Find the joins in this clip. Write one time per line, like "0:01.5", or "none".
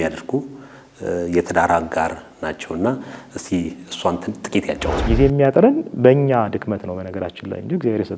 0:04.9